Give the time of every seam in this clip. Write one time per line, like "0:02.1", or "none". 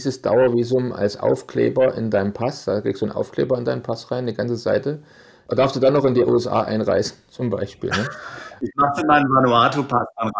none